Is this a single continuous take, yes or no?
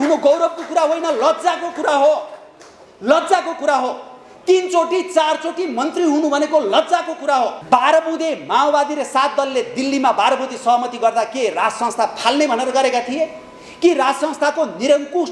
no